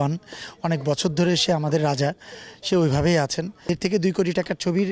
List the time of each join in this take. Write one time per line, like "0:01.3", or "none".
0:03.7